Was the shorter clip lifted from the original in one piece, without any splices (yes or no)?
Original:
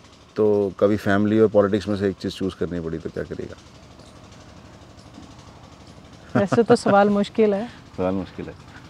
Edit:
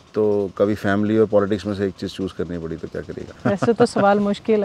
no